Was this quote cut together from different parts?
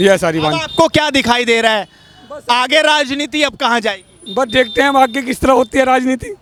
no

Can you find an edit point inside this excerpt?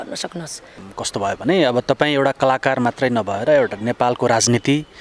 no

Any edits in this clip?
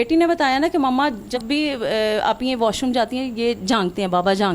yes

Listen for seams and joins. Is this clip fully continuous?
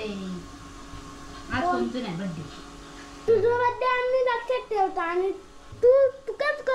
no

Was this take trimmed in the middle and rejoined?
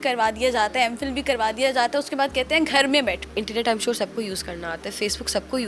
yes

